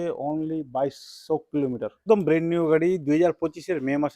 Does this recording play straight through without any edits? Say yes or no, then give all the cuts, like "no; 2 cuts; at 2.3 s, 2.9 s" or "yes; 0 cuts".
no; 1 cut; at 2.0 s